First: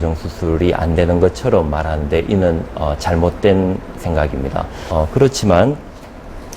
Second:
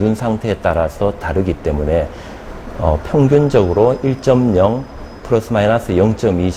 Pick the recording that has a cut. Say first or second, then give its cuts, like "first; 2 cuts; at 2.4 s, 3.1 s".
first; 1 cut; at 4.8 s